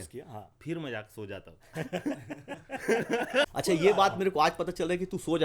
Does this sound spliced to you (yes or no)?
yes